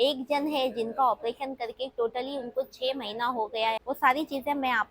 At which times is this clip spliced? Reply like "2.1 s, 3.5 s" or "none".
3.8 s